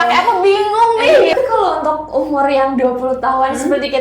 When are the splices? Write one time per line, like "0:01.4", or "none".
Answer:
0:01.3